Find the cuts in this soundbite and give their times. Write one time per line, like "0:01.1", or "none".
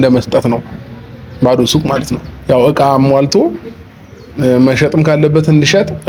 none